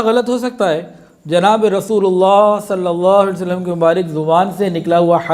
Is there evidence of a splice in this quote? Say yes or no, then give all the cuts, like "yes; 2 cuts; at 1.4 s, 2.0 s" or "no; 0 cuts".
no; 0 cuts